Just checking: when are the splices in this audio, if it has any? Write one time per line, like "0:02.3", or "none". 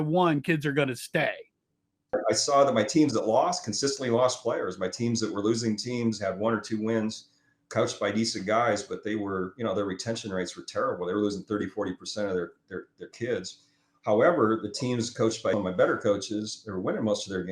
0:02.0
0:15.5